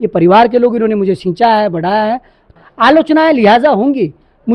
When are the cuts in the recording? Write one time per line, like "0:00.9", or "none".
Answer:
0:02.5